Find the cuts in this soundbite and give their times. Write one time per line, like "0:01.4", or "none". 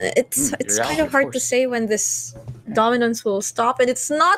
none